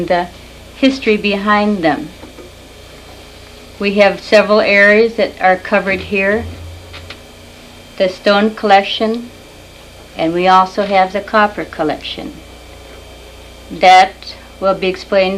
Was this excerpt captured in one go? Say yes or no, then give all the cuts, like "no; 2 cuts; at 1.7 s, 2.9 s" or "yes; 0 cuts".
yes; 0 cuts